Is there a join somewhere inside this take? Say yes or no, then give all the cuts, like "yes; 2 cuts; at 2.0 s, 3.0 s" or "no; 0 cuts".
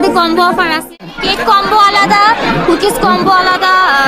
yes; 1 cut; at 0.9 s